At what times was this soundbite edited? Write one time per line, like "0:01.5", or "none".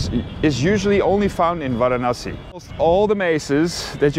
0:02.7